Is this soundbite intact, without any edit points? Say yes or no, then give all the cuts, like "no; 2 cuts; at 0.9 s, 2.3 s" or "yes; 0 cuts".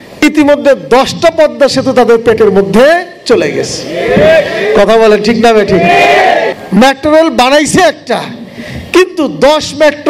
no; 1 cut; at 6.6 s